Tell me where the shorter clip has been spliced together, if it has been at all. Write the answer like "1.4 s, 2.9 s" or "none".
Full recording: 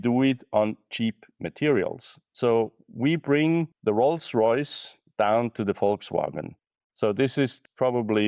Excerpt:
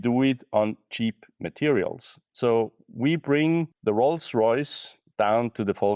none